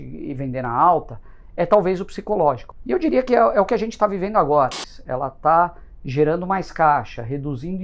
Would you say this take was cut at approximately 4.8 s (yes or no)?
yes